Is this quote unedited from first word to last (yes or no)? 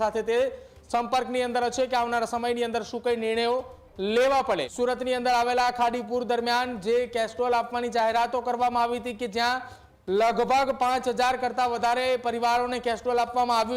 no